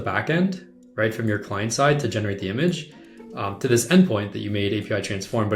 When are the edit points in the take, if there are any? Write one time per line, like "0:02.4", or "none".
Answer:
none